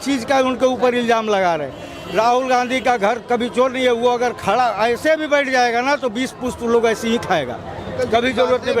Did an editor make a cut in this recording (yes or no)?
no